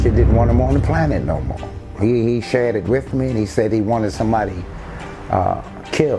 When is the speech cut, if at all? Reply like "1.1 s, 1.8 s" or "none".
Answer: none